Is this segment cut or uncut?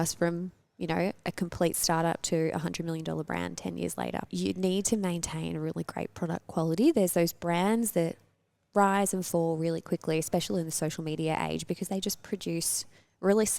cut